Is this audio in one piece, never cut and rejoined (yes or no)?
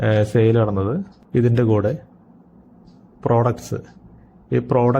no